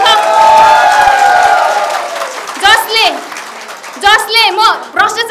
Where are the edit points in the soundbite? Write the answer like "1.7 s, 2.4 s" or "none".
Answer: none